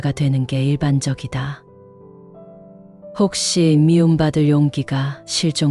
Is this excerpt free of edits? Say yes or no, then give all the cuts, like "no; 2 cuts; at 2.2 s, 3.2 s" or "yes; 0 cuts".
no; 2 cuts; at 1.9 s, 3.2 s